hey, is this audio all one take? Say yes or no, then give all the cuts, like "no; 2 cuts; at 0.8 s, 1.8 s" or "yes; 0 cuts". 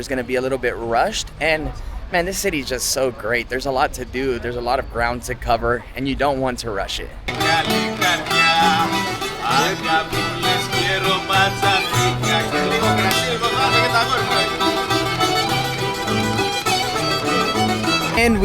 yes; 0 cuts